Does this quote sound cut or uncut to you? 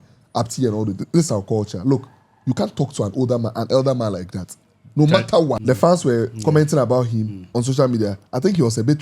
cut